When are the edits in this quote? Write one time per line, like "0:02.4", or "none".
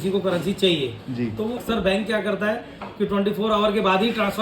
0:01.6